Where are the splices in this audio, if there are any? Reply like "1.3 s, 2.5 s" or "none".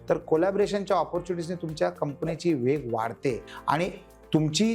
3.5 s